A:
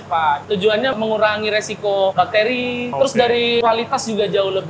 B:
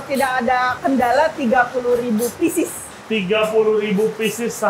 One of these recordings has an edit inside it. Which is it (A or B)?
A